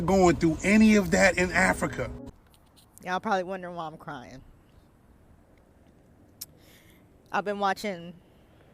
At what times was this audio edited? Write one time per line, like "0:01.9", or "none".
0:02.3